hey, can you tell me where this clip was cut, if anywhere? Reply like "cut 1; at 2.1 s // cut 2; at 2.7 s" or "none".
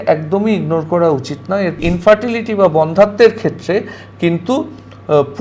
cut 1; at 1.8 s